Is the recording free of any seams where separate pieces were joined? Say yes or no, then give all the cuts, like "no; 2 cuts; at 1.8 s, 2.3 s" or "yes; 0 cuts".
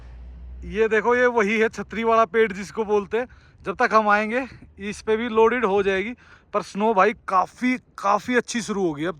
yes; 0 cuts